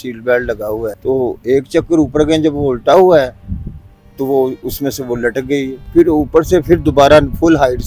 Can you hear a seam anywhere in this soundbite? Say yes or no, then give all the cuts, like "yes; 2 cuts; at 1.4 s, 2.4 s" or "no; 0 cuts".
yes; 2 cuts; at 1.0 s, 5.8 s